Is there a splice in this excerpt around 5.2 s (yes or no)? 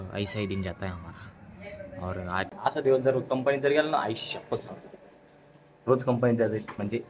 no